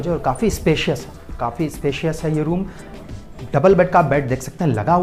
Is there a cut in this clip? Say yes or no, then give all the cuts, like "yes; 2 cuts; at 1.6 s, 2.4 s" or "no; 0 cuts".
no; 0 cuts